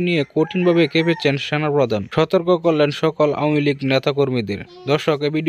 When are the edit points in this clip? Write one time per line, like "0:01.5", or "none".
0:02.1